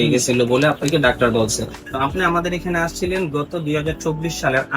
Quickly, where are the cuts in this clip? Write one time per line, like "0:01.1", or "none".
0:01.8